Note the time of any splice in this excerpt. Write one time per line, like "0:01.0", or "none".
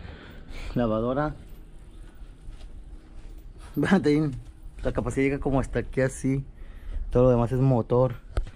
none